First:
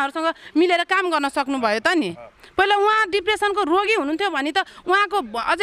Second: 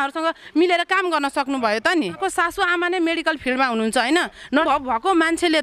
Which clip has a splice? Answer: second; 2 cuts; at 2.2 s, 4.6 s

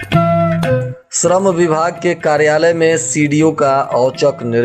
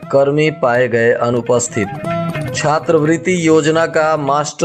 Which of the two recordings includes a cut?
first; 1 cut; at 1.0 s

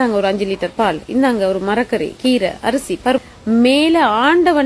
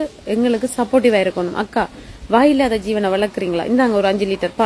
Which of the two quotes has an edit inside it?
first; 1 cut; at 3.2 s

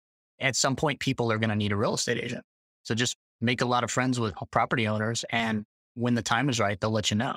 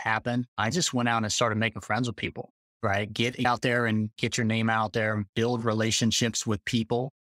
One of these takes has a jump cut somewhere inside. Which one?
second; 1 cut; at 3.4 s

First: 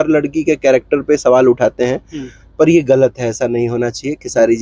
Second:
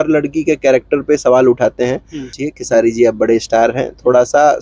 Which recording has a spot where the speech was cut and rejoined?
second; 1 cut; at 2.4 s

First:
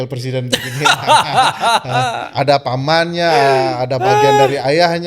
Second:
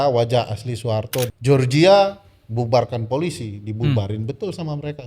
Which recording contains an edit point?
second; 1 cut; at 1.3 s

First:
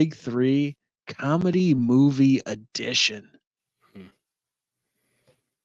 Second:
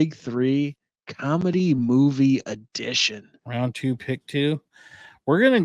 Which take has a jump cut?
second; 1 cut; at 3.4 s

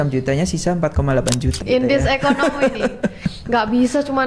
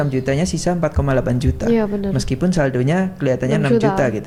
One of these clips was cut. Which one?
first; 1 cut; at 1.6 s

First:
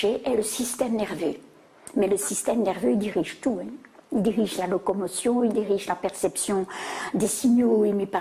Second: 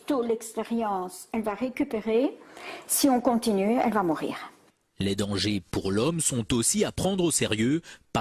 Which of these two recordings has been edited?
second; 1 cut; at 3.5 s

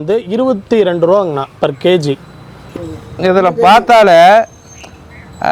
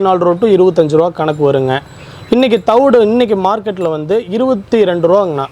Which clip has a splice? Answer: first; 1 cut; at 2.6 s

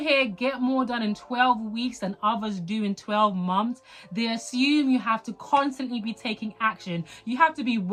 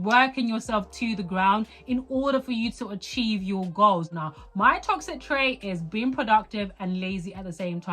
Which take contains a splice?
second; 1 cut; at 4.1 s

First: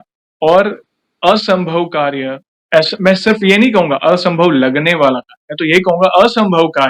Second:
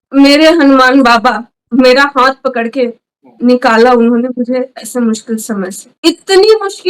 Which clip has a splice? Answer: second; 1 cut; at 5.9 s

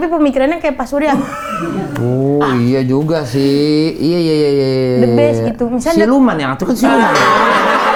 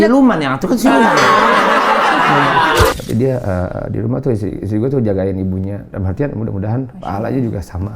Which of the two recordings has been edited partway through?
second; 1 cut; at 2.9 s

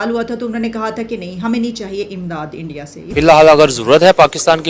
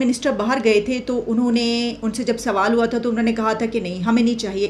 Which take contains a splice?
first; 1 cut; at 3.1 s

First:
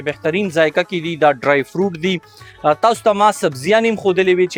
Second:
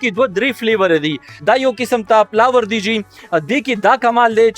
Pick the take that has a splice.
second; 1 cut; at 1.3 s

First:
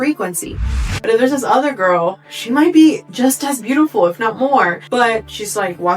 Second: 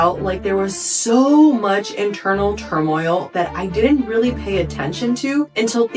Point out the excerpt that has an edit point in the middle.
first; 2 cuts; at 0.8 s, 4.8 s

